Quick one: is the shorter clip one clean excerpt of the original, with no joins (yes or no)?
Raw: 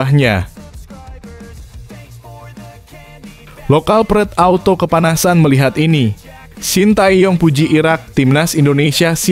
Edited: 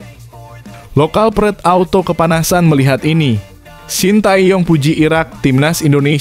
no